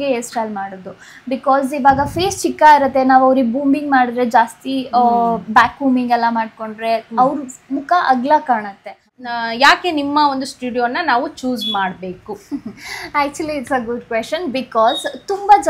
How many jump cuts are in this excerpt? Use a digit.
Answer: 1